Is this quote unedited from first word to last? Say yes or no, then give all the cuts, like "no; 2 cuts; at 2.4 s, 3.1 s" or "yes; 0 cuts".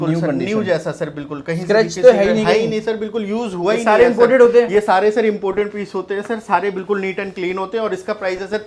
yes; 0 cuts